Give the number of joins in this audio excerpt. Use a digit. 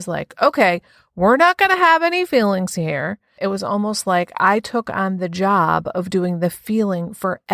1